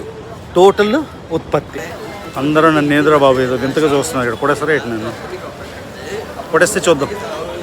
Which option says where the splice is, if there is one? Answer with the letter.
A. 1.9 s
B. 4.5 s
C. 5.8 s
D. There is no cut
A